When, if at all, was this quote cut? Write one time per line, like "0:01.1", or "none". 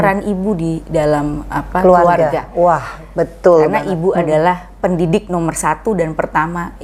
none